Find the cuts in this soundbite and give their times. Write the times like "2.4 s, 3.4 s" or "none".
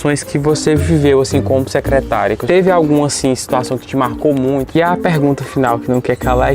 2.4 s, 4.8 s